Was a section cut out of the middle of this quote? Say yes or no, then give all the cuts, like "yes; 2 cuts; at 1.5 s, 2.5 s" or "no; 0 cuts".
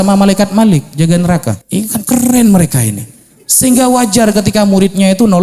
yes; 1 cut; at 1.6 s